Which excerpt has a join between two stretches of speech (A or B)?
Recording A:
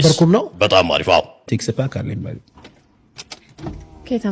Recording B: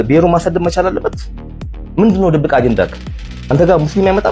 A